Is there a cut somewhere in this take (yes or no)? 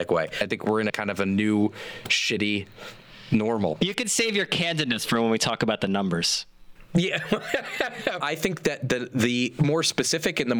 yes